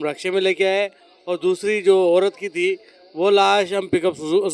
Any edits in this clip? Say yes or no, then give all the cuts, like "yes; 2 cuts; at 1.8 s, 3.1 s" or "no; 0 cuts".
no; 0 cuts